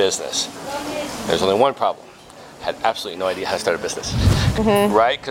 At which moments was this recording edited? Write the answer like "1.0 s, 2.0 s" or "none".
4.4 s